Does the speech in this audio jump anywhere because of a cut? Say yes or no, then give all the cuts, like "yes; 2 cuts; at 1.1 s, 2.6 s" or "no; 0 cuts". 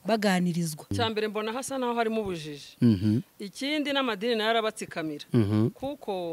yes; 1 cut; at 0.9 s